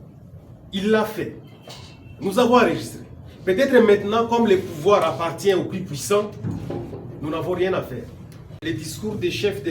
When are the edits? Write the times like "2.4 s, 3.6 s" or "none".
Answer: 8.6 s